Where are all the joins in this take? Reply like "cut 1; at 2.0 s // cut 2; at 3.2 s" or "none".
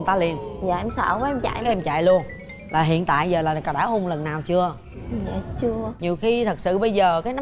cut 1; at 5.9 s